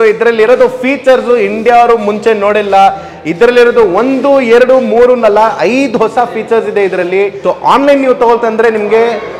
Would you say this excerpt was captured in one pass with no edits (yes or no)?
no